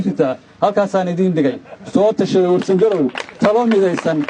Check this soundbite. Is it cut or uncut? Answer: uncut